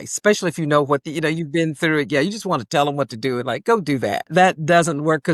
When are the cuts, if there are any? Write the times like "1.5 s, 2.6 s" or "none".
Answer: 1.0 s, 4.3 s